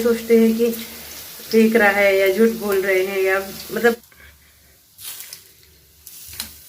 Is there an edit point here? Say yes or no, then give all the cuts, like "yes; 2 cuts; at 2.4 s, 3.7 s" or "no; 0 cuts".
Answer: yes; 1 cut; at 4.1 s